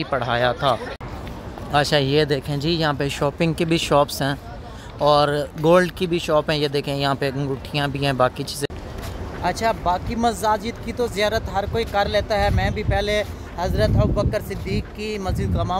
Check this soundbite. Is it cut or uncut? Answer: cut